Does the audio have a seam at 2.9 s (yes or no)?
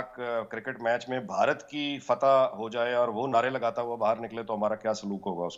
no